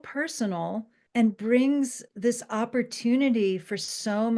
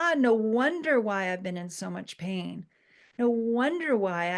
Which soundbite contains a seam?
first; 2 cuts; at 0.9 s, 2.0 s

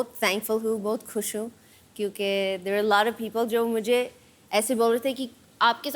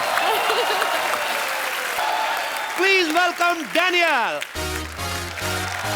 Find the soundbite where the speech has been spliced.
second; 1 cut; at 2.0 s

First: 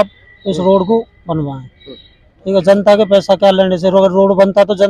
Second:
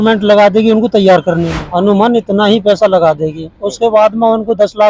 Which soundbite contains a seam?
second; 1 cut; at 1.6 s

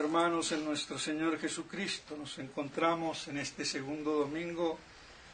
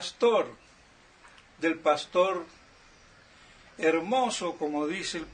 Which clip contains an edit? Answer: first; 1 cut; at 1.2 s

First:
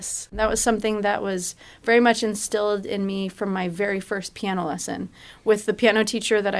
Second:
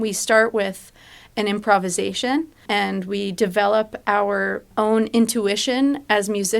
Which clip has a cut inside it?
second; 2 cuts; at 2.6 s, 4.7 s

